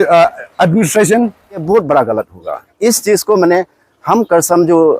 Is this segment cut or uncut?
cut